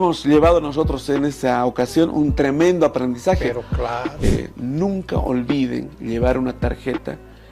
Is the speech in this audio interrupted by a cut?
yes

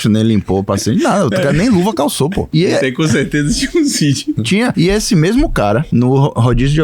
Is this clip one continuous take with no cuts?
no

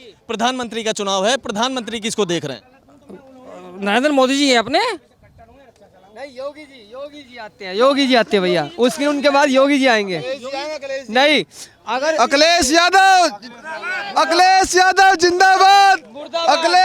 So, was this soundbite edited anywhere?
no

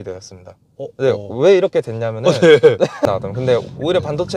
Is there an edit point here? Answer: yes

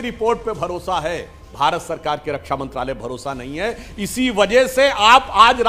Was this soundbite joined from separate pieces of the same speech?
no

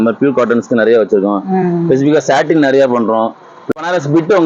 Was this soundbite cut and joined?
yes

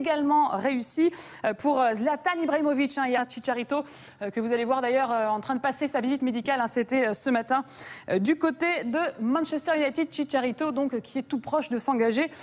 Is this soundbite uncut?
yes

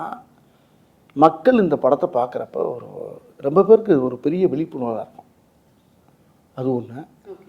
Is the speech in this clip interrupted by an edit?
no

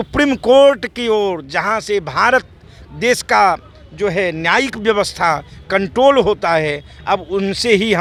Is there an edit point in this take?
no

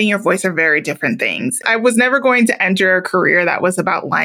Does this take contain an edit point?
yes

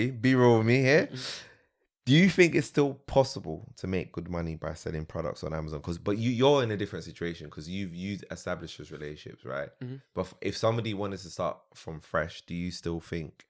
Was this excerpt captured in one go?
yes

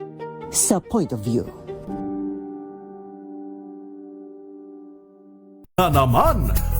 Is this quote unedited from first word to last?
no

